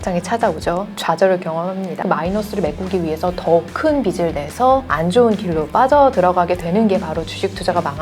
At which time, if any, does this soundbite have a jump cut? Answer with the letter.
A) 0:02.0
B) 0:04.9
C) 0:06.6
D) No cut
A